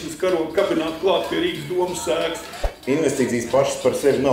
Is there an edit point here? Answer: yes; 1 cut; at 2.7 s

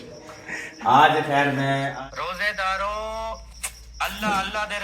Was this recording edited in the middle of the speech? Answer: yes; 1 cut; at 1.9 s

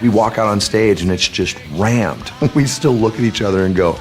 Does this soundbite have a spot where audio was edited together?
yes; 1 cut; at 2.3 s

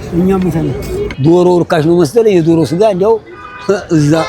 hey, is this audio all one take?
no; 1 cut; at 1.1 s

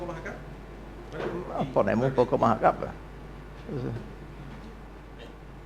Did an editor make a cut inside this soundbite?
yes; 1 cut; at 4.6 s

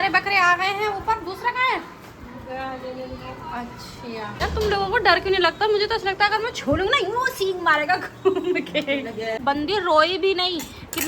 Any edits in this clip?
yes; 2 cuts; at 4.4 s, 9.4 s

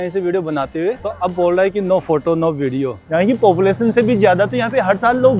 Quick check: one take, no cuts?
no; 2 cuts; at 1.1 s, 3.1 s

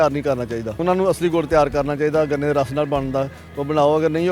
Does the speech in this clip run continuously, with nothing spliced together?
yes; 0 cuts

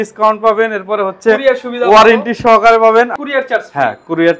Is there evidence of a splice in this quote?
yes; 1 cut; at 3.1 s

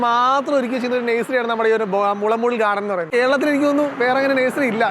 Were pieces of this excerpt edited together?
yes; 1 cut; at 3.1 s

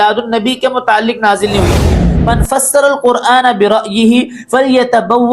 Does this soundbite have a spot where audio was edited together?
yes; 1 cut; at 2.0 s

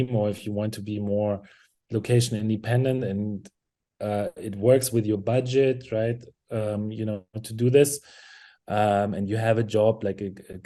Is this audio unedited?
yes; 0 cuts

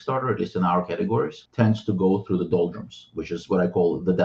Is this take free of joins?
no; 1 cut; at 1.4 s

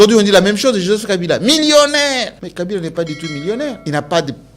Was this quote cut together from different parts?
yes; 2 cuts; at 2.4 s, 3.8 s

